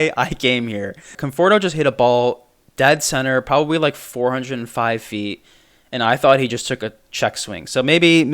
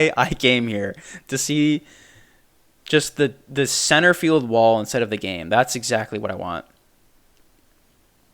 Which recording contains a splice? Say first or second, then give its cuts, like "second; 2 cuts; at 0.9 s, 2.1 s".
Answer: first; 1 cut; at 1.2 s